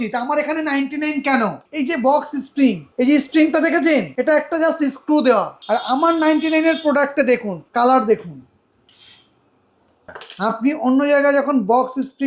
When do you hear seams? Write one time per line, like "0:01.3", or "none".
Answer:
0:01.6
0:02.9
0:04.1
0:05.6
0:07.5
0:09.9